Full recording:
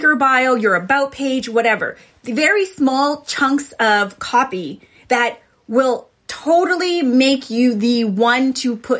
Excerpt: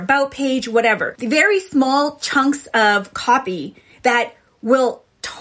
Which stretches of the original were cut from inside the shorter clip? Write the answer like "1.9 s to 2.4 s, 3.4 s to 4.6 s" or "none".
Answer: 1.9 s to 2.2 s